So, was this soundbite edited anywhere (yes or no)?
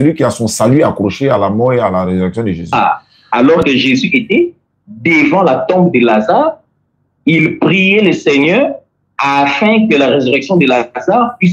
yes